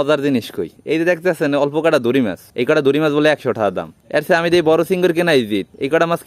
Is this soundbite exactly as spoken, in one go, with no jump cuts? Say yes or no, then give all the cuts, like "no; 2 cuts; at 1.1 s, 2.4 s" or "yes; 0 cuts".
yes; 0 cuts